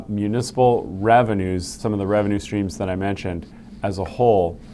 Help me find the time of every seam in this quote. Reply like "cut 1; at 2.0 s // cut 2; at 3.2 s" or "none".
cut 1; at 1.8 s